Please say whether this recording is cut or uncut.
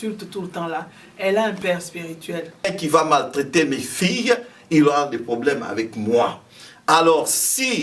cut